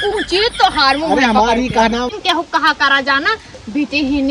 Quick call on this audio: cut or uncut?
cut